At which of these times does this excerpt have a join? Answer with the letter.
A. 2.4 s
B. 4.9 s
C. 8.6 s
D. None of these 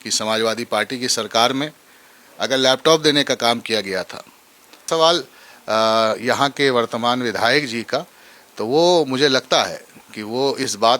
B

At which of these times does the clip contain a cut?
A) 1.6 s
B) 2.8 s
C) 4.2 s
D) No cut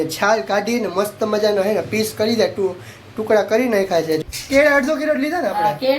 C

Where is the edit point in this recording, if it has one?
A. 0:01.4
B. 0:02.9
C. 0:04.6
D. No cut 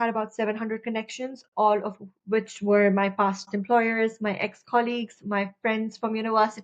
D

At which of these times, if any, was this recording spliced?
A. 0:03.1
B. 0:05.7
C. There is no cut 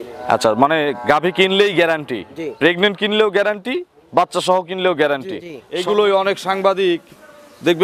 B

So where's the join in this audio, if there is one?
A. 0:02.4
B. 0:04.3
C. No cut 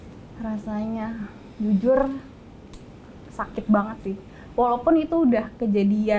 C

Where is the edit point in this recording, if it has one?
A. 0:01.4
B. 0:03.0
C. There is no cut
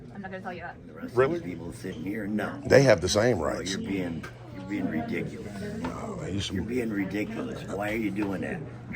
A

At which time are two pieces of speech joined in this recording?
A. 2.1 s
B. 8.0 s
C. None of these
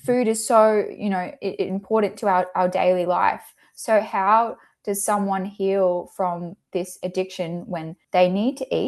B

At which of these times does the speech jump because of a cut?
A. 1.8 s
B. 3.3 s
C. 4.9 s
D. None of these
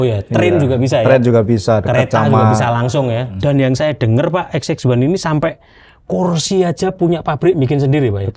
B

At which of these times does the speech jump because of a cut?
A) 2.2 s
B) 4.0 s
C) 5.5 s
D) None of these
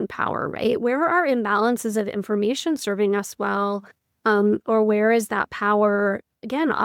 D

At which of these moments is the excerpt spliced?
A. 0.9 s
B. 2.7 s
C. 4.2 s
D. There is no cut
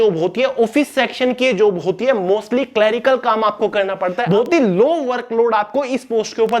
C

